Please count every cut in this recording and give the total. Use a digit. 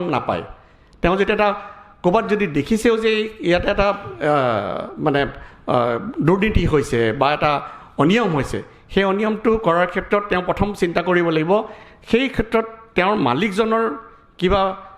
0